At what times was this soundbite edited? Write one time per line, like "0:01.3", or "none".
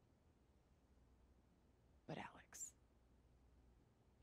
0:01.4